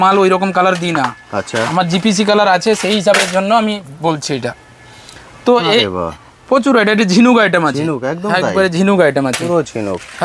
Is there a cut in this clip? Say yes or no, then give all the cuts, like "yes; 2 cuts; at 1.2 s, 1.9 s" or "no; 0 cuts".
no; 0 cuts